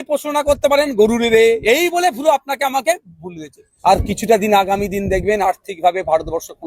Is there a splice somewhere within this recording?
yes; 1 cut; at 3.7 s

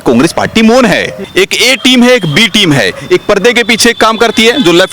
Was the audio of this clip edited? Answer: yes; 1 cut; at 1.2 s

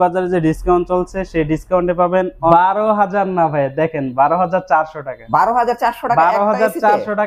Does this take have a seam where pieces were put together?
yes; 1 cut; at 2.5 s

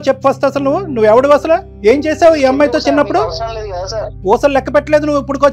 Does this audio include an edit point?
yes; 1 cut; at 4.2 s

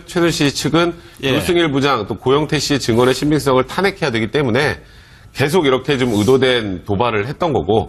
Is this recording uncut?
yes; 0 cuts

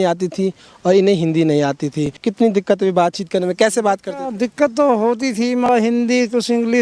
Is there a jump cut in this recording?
yes; 2 cuts; at 2.2 s, 5.7 s

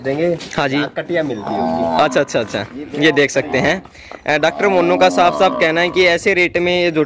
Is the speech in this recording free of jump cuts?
yes; 0 cuts

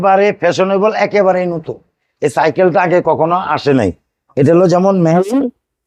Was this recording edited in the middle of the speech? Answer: no; 0 cuts

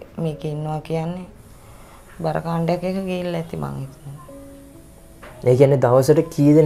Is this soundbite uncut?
yes; 0 cuts

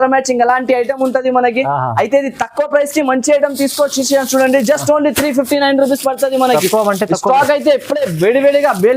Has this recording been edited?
no; 0 cuts

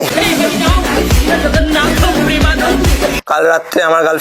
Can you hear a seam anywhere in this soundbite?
yes; 1 cut; at 3.2 s

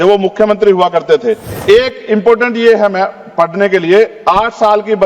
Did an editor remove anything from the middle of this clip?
yes; 1 cut; at 1.5 s

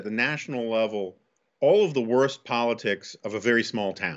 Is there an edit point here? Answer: no; 0 cuts

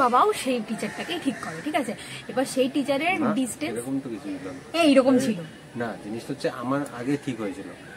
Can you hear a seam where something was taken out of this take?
no; 0 cuts

